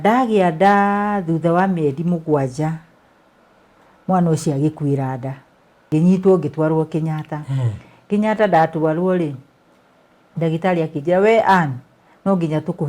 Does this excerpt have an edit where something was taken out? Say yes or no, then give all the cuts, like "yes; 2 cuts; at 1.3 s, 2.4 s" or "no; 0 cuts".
yes; 1 cut; at 5.9 s